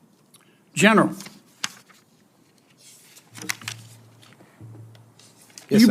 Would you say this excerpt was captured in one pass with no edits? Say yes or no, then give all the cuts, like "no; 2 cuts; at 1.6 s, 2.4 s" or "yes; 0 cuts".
yes; 0 cuts